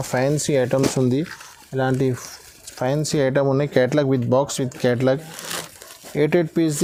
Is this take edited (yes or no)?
no